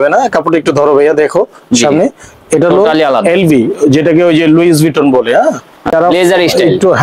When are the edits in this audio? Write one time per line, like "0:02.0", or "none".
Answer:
0:05.9